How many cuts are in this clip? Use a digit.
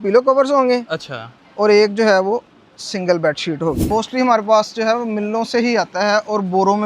1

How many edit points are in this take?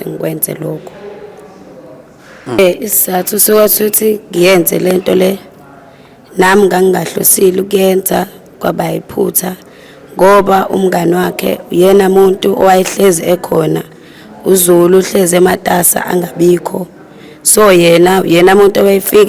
1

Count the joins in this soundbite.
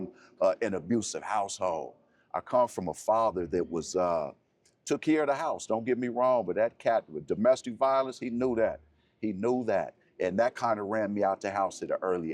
0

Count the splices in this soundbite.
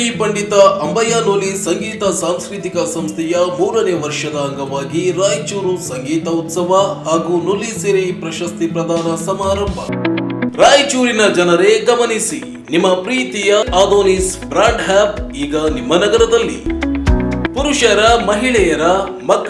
1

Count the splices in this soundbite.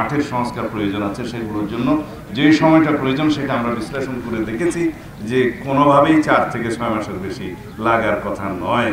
0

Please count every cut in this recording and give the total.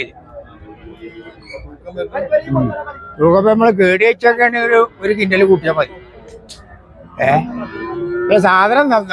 0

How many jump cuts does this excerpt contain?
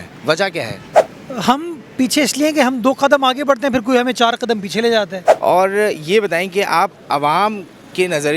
1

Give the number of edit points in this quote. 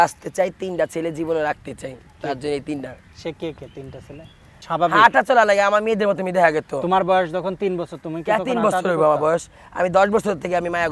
1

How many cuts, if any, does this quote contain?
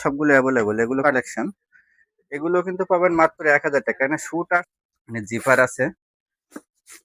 2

